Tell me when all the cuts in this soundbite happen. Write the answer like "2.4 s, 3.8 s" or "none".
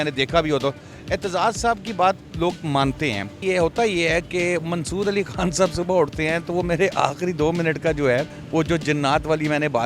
3.4 s, 8.4 s